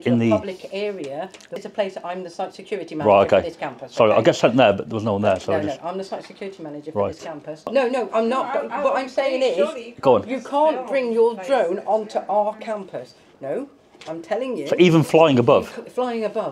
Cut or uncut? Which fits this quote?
cut